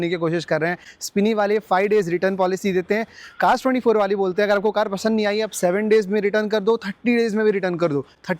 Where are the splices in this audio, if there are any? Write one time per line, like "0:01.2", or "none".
none